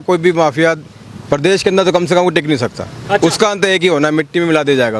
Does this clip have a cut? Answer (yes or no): no